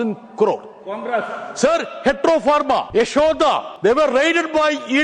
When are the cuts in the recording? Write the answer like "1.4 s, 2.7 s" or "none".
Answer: 2.9 s, 3.7 s